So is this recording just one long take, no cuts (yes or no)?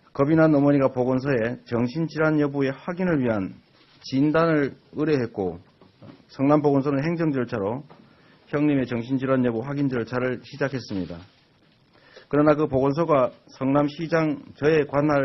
no